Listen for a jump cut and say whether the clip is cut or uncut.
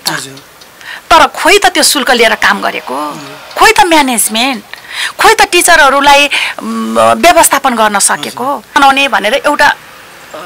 cut